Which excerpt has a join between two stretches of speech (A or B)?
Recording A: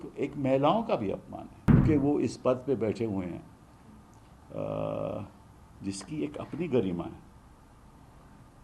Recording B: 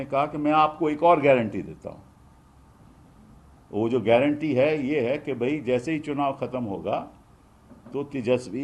A